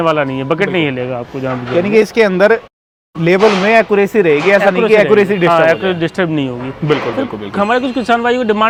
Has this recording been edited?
no; 0 cuts

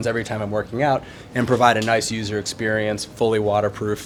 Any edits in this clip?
no; 0 cuts

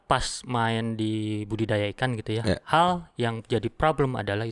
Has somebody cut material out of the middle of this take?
no; 0 cuts

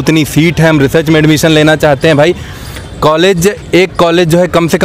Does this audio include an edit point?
no; 0 cuts

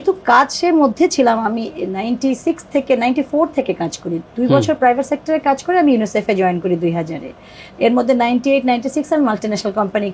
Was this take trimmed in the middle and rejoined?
no; 0 cuts

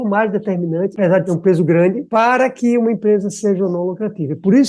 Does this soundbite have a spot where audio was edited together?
yes; 2 cuts; at 1.0 s, 2.0 s

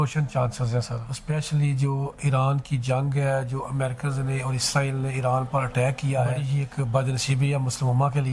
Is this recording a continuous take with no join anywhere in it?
no; 2 cuts; at 1.1 s, 6.5 s

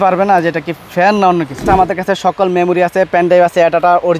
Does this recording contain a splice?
yes; 1 cut; at 1.6 s

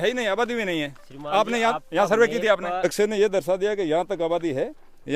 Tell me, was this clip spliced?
yes; 1 cut; at 2.8 s

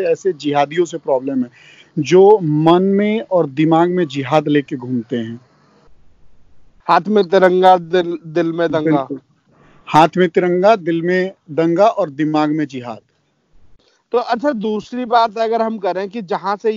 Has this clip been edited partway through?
no; 0 cuts

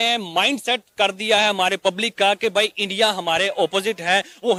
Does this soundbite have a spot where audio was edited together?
no; 0 cuts

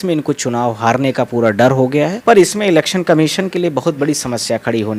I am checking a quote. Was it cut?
yes; 1 cut; at 2.2 s

